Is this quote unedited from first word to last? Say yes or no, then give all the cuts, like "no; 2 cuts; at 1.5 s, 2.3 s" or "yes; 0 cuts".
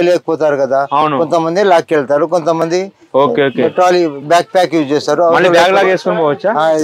yes; 0 cuts